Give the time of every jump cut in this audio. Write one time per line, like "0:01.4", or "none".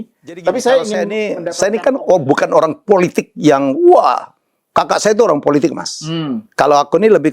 0:01.1